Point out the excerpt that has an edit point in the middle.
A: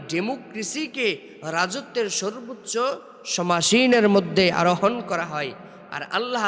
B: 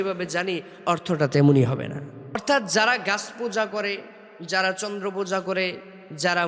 B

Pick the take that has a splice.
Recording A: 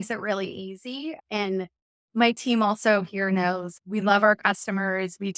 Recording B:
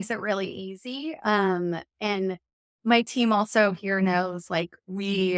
A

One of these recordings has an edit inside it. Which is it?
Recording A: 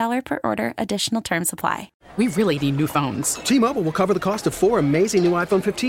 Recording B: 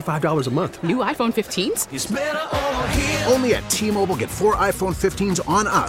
A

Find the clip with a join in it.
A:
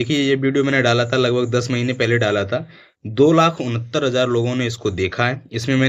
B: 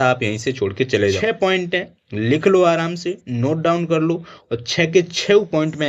B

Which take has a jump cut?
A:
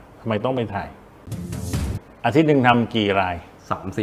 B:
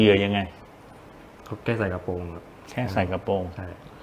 A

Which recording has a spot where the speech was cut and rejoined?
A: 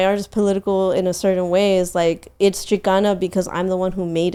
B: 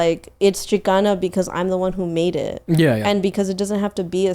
B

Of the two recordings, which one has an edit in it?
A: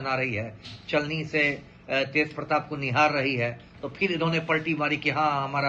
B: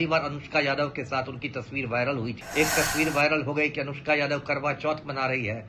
B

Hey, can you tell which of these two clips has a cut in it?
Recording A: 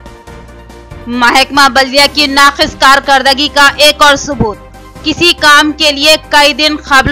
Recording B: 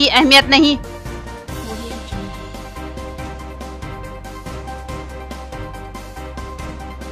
A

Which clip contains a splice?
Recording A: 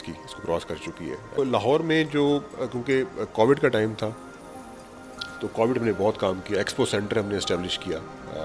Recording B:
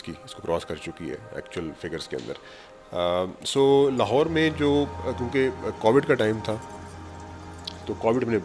A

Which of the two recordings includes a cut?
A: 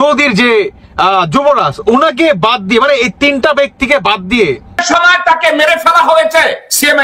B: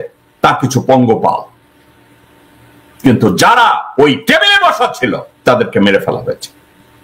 A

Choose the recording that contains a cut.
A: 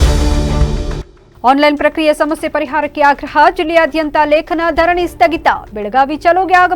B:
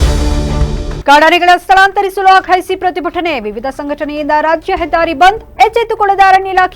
B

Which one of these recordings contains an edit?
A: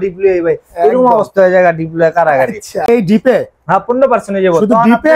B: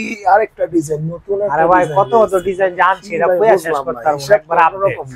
A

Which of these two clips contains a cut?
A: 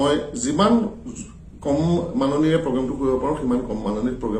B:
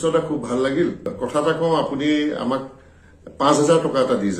B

